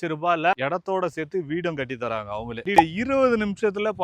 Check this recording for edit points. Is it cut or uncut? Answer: cut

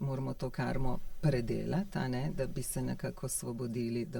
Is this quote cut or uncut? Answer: uncut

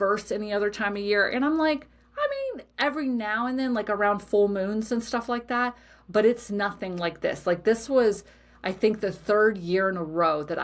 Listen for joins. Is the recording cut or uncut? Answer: uncut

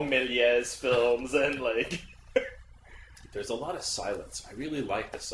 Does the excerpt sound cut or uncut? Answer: cut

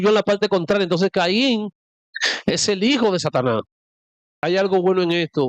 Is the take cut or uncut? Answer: cut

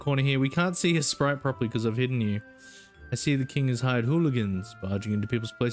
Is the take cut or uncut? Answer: uncut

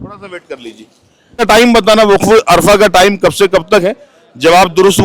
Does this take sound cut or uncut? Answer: cut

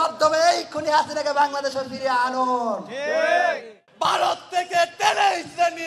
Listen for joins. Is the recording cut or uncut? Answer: cut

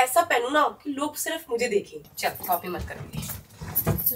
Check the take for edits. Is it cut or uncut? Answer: cut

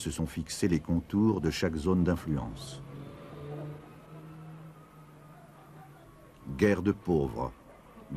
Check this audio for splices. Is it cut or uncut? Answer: cut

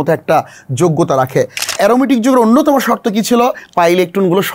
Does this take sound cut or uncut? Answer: cut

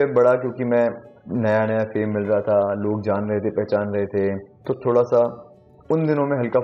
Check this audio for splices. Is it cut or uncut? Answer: cut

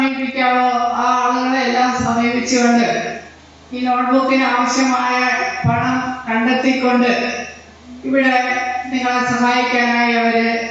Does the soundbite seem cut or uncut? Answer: uncut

